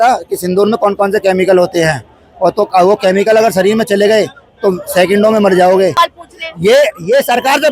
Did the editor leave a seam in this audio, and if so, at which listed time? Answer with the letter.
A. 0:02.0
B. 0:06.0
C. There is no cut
B